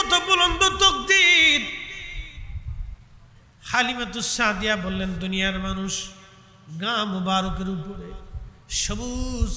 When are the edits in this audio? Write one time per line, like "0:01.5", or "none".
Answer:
none